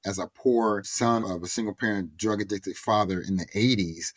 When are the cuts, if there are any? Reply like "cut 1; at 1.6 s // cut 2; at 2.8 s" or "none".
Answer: cut 1; at 1.1 s